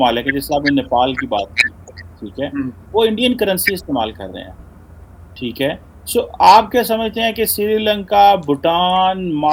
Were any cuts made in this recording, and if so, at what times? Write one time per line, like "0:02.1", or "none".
none